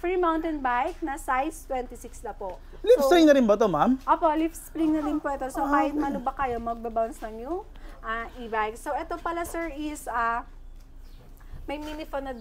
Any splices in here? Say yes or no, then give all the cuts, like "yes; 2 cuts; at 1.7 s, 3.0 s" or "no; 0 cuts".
no; 0 cuts